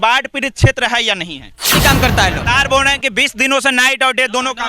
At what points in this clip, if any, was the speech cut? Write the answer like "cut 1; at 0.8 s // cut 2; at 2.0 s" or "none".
cut 1; at 1.7 s